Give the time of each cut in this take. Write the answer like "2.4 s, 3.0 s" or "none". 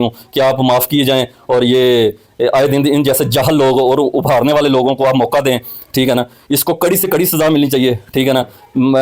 none